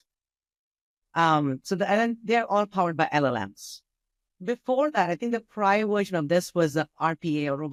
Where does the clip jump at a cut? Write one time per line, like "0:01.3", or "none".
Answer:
none